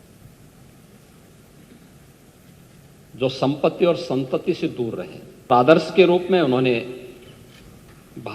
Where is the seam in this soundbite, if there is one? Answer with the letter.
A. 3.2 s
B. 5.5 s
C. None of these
B